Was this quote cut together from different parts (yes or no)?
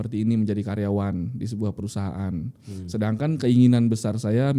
no